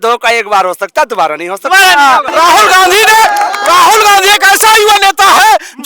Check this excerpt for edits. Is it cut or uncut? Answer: cut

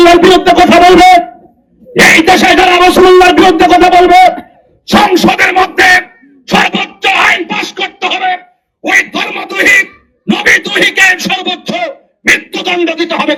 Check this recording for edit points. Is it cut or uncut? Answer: uncut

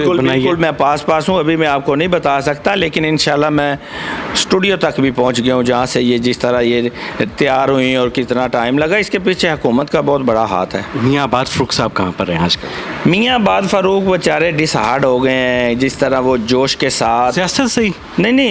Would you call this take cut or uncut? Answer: uncut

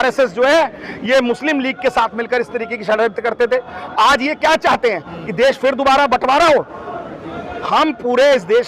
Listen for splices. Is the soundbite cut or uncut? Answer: uncut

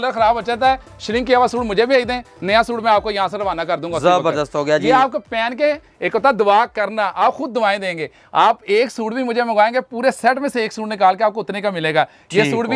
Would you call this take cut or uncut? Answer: uncut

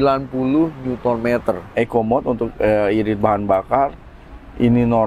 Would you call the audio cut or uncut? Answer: cut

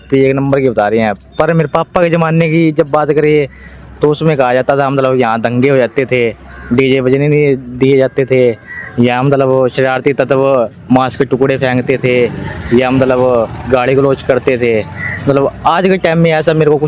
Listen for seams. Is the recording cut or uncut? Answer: uncut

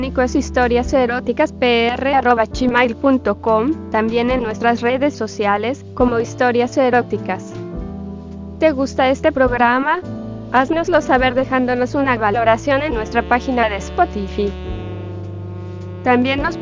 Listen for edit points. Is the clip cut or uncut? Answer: cut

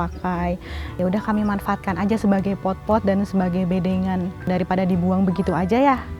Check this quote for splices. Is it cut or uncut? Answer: cut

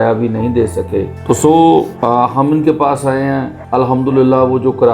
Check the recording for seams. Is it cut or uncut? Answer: cut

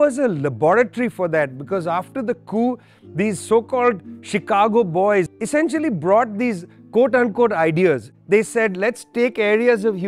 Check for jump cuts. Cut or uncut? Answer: uncut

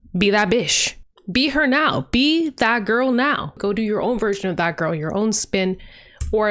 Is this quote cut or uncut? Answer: cut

